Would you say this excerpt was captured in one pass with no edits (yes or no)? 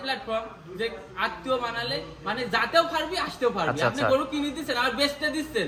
yes